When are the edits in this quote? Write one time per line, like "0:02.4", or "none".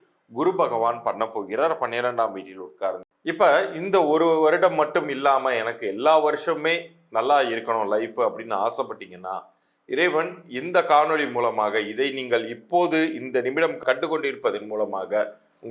0:03.0